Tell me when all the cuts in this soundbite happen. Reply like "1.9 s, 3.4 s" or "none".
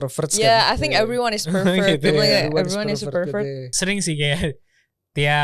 3.8 s